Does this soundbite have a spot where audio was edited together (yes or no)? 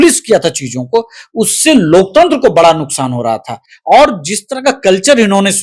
no